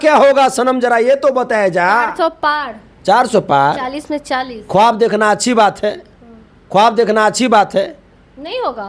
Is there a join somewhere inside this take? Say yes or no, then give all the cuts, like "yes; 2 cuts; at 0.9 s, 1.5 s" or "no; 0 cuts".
no; 0 cuts